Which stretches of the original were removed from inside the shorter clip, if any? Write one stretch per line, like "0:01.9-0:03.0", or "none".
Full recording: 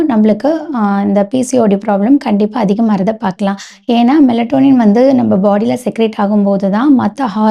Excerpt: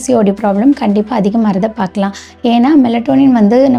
none